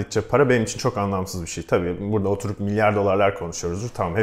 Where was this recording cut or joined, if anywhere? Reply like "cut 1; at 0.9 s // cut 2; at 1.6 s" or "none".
none